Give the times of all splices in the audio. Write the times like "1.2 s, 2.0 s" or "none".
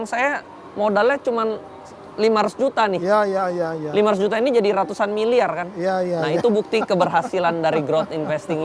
none

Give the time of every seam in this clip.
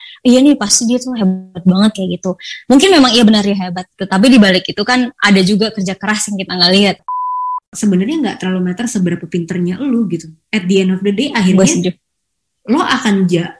7.3 s

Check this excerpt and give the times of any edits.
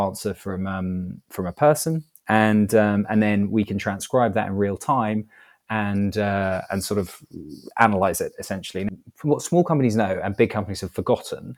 8.8 s

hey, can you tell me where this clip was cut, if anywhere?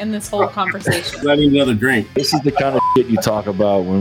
1.2 s, 2.2 s

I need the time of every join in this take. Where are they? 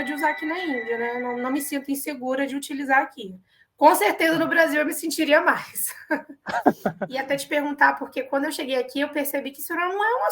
7.1 s

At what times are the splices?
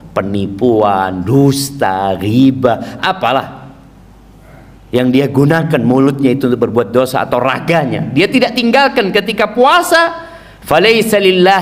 none

